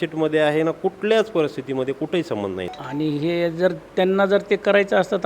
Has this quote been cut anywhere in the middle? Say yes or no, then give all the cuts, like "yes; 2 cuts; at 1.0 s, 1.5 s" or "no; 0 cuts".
yes; 1 cut; at 2.7 s